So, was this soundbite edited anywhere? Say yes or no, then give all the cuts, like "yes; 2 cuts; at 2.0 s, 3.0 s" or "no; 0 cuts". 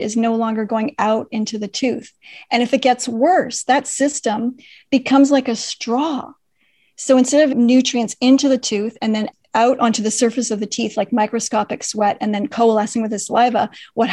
yes; 2 cuts; at 7.5 s, 9.3 s